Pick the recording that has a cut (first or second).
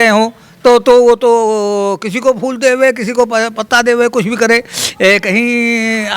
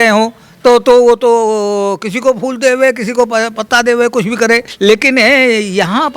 second